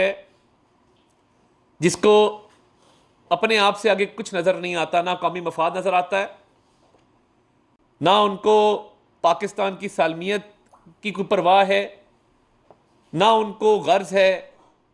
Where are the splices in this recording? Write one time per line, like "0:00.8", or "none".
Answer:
none